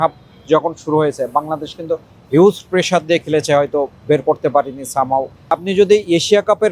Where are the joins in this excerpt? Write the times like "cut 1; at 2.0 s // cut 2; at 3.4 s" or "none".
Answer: cut 1; at 5.5 s